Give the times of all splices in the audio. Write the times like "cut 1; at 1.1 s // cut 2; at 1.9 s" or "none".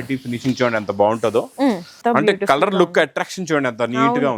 cut 1; at 1.9 s